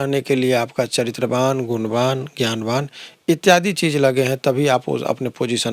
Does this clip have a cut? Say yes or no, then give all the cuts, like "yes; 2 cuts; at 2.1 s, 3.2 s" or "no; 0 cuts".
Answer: no; 0 cuts